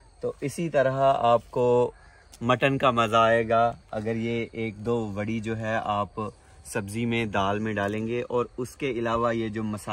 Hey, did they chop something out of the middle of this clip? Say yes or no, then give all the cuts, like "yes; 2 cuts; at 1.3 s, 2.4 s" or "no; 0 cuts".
no; 0 cuts